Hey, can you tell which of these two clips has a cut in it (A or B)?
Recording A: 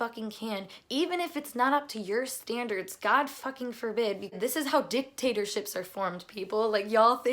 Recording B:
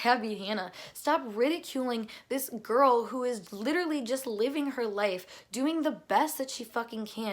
A